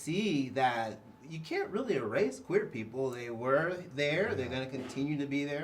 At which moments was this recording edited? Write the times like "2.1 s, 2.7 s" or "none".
none